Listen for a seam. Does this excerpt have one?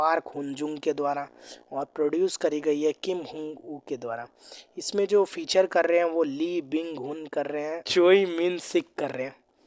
yes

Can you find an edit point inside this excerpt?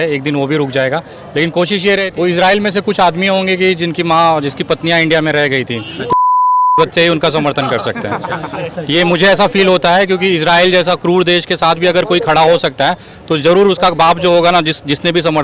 yes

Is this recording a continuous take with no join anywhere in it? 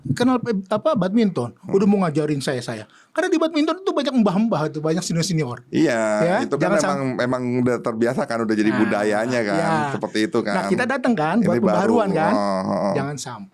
yes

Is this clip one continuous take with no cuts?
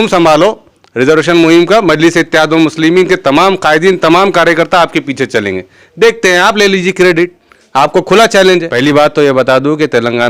no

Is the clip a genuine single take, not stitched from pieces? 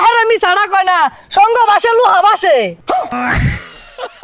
no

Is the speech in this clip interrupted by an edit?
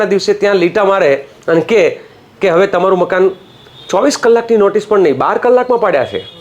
no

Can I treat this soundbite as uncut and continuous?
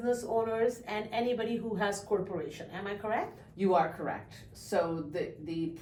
yes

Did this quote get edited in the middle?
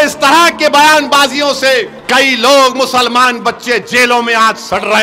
yes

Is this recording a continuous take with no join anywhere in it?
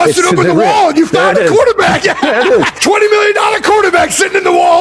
no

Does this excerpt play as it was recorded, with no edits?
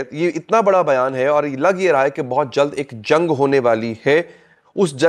yes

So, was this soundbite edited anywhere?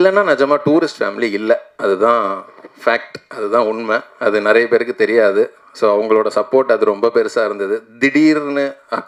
no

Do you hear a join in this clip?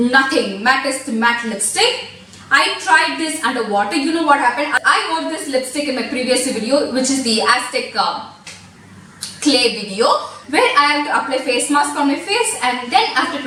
no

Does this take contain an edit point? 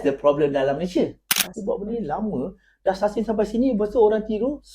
yes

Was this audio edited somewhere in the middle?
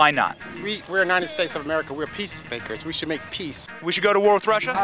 yes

